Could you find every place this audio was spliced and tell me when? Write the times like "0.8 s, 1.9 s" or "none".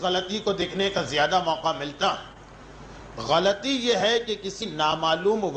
2.2 s